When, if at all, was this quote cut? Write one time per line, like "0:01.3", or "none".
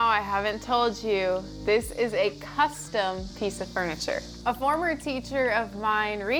none